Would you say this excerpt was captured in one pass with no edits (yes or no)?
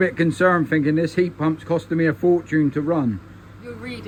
yes